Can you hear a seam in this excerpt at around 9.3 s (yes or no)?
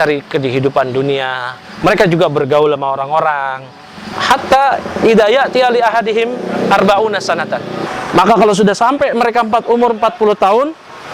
no